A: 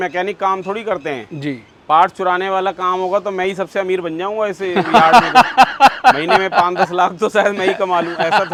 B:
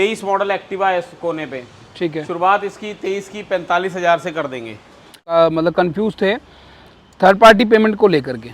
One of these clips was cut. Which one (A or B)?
B